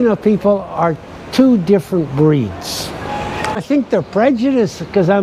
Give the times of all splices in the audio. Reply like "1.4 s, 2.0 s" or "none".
3.6 s